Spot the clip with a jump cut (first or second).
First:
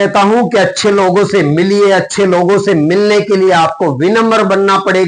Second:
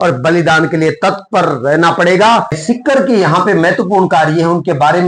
second